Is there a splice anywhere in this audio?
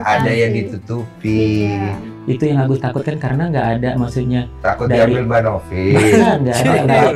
no; 0 cuts

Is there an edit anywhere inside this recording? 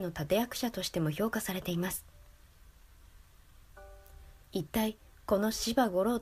no; 0 cuts

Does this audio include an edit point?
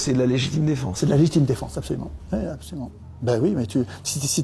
no; 0 cuts

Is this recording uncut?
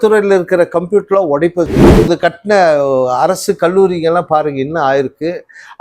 no; 1 cut; at 2.1 s

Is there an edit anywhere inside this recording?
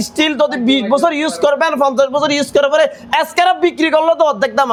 no; 0 cuts

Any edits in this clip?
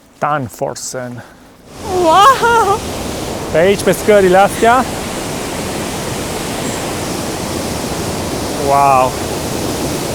yes; 1 cut; at 1.8 s

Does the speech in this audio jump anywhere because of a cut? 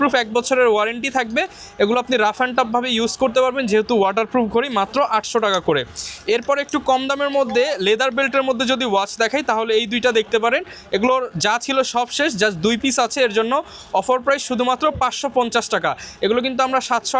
no; 0 cuts

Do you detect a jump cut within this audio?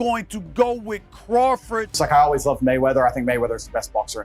yes; 1 cut; at 1.9 s

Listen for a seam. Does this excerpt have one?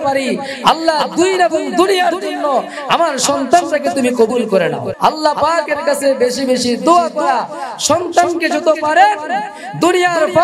yes; 1 cut; at 4.9 s

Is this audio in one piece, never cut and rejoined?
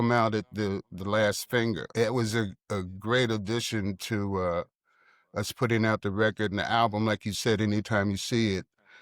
no; 1 cut; at 1.9 s

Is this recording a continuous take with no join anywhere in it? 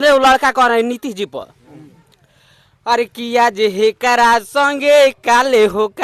yes; 0 cuts

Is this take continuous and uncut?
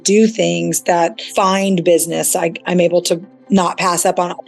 no; 1 cut; at 1.2 s

